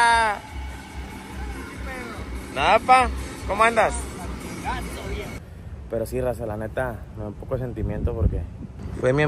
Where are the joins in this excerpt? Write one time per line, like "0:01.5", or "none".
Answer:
0:05.4